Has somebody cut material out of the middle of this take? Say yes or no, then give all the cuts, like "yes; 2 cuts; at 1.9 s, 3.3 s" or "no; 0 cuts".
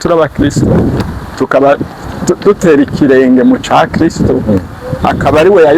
yes; 1 cut; at 1.0 s